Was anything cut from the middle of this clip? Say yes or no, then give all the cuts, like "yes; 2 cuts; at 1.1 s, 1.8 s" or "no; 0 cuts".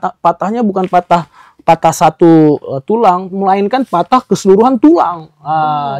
no; 0 cuts